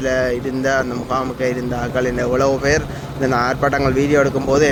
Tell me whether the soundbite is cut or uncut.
uncut